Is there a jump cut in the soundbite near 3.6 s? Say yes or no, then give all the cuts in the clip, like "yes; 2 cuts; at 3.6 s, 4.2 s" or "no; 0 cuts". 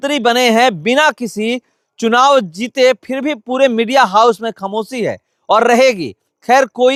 no; 0 cuts